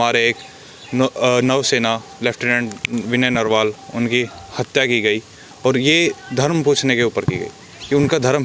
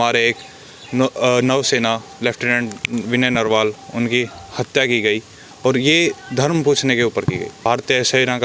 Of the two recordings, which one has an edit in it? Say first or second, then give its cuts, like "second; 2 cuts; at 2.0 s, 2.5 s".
second; 1 cut; at 7.5 s